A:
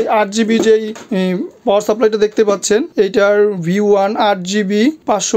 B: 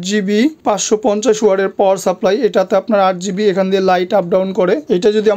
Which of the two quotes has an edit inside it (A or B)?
A